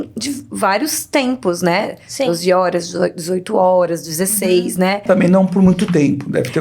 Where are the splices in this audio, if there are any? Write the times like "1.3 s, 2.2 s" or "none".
5.0 s